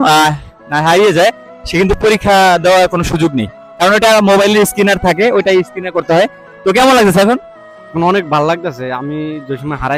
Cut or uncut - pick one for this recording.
uncut